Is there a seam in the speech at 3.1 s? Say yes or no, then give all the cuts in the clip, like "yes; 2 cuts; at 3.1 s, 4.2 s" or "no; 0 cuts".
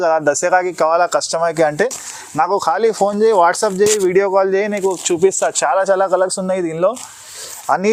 no; 0 cuts